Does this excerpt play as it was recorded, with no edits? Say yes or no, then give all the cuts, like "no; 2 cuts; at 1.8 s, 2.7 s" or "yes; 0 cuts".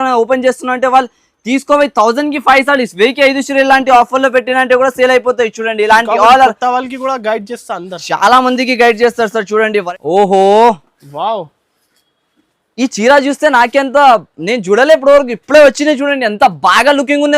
no; 1 cut; at 9.9 s